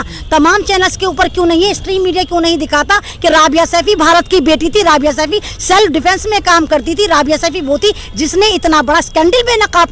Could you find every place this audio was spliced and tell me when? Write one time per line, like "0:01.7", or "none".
none